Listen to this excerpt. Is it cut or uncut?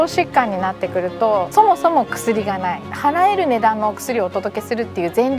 cut